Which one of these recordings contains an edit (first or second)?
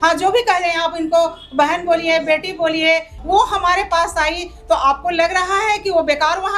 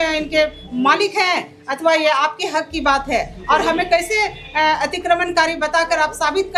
first